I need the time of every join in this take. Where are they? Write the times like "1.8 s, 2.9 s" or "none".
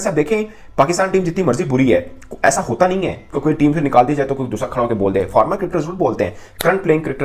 none